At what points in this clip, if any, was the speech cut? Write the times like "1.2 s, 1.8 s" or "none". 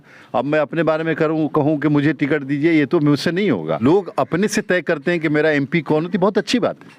3.8 s